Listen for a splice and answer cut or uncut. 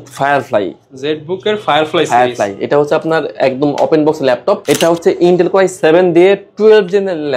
uncut